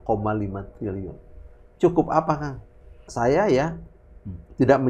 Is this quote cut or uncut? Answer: cut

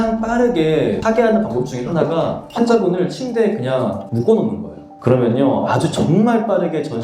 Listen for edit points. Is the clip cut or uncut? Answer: cut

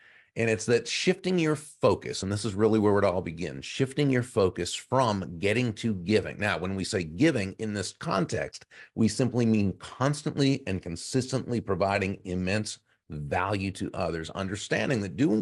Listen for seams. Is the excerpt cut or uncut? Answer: uncut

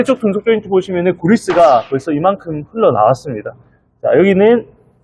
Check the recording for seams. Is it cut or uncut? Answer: uncut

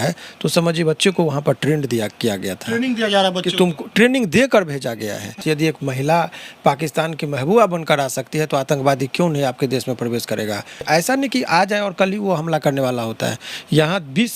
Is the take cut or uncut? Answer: cut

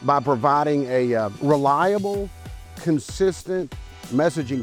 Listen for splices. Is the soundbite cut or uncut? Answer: uncut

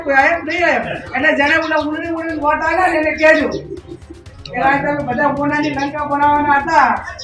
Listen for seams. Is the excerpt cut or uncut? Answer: cut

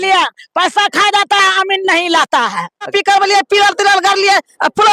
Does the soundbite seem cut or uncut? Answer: cut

